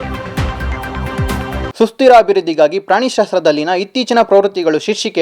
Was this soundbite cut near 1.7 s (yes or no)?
yes